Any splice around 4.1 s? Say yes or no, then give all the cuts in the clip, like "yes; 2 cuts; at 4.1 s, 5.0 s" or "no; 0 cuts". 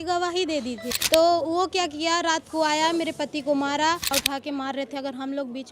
yes; 2 cuts; at 0.9 s, 4.1 s